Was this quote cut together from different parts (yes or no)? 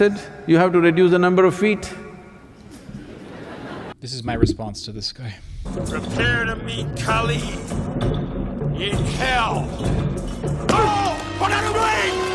yes